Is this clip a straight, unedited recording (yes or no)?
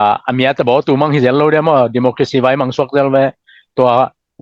yes